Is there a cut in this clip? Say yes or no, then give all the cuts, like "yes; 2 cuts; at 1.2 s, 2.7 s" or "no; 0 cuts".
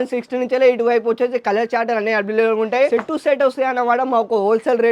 no; 0 cuts